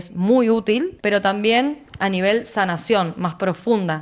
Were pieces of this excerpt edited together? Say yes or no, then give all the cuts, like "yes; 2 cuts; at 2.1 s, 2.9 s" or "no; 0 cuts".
yes; 1 cut; at 0.9 s